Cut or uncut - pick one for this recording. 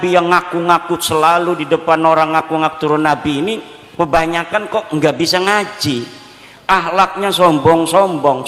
uncut